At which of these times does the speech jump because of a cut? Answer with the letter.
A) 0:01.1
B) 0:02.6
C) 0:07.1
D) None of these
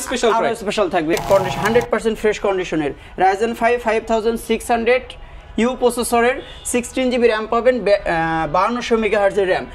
A